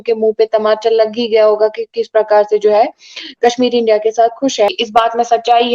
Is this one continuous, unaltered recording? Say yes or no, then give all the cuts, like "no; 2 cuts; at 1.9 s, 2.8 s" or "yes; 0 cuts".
no; 1 cut; at 4.8 s